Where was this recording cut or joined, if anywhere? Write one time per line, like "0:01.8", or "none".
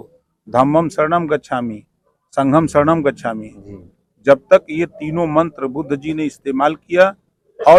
none